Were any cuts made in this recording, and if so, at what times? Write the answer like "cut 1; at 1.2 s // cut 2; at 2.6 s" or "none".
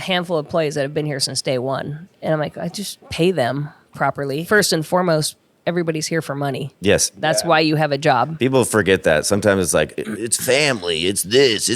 cut 1; at 2.0 s // cut 2; at 3.0 s // cut 3; at 4.4 s // cut 4; at 7.2 s